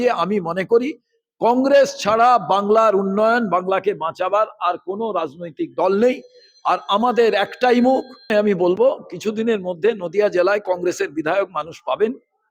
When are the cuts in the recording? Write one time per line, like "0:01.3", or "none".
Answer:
0:08.3